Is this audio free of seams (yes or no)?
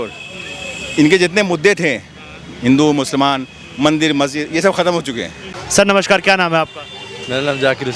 no